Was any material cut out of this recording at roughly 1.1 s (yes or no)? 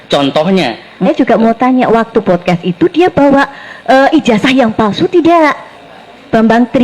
yes